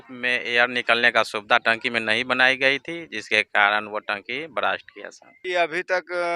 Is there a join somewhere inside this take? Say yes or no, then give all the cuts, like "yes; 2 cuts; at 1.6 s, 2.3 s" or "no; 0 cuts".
yes; 1 cut; at 5.3 s